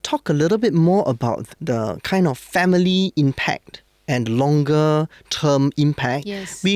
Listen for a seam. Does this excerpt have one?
yes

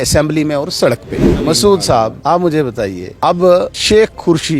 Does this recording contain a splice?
yes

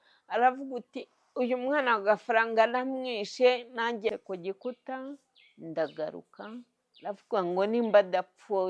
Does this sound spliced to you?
yes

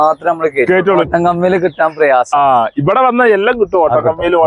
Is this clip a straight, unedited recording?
no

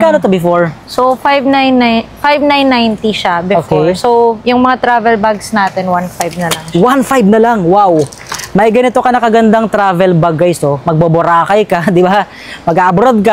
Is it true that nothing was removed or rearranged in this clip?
yes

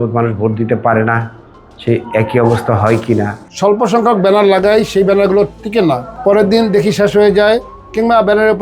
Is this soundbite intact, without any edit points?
no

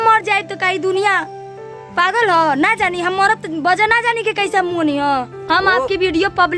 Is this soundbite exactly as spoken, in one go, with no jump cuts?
no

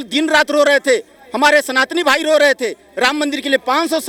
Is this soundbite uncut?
yes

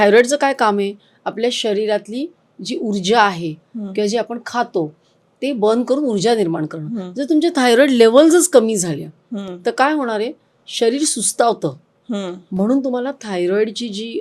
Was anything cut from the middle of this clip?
no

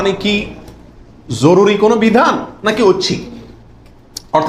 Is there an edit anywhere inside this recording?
no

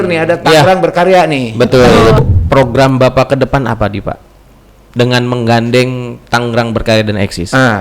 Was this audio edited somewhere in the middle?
yes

